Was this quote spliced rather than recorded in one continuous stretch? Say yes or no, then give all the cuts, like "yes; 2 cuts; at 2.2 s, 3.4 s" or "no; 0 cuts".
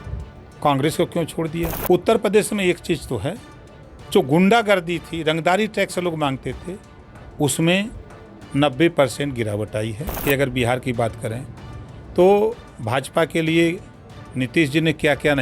yes; 2 cuts; at 1.8 s, 10.2 s